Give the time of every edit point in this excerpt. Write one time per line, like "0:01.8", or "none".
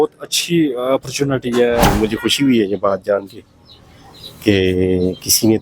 0:01.8